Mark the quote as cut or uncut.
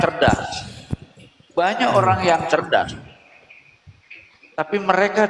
uncut